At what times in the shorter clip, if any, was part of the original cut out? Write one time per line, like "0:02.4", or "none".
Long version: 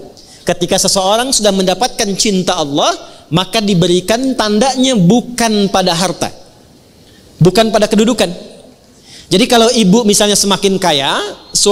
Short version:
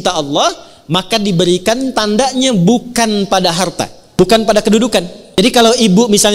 0:04.2
0:05.2